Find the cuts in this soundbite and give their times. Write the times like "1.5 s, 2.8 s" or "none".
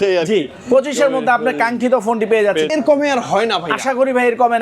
2.7 s